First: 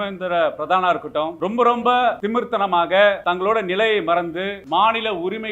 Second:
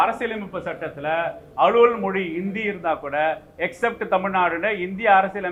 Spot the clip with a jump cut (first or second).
first